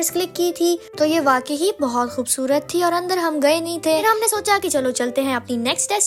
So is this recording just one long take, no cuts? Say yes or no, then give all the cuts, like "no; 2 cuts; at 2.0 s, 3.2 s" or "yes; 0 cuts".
yes; 0 cuts